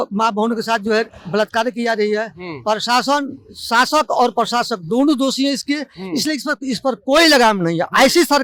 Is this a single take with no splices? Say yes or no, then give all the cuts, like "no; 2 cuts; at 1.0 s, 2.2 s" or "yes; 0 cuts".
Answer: yes; 0 cuts